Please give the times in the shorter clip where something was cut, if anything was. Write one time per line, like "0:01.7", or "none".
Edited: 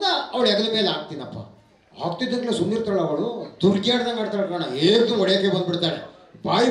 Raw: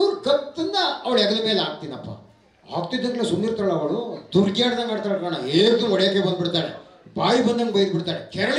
none

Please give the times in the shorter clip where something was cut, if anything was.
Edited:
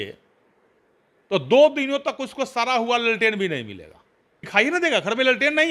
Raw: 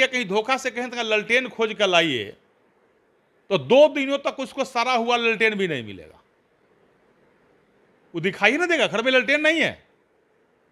0:04.5

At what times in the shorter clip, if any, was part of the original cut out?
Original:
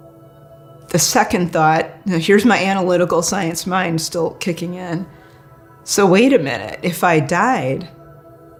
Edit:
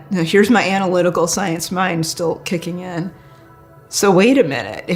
none

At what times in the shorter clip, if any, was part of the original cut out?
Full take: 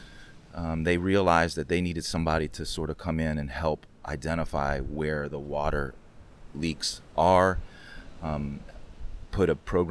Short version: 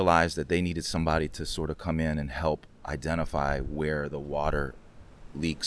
none

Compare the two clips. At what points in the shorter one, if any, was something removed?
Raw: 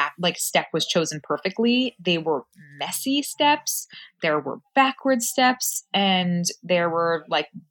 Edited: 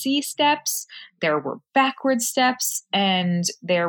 none

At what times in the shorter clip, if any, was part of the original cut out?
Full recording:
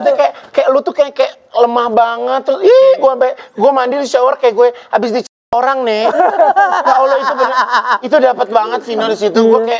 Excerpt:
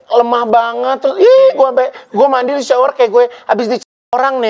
none

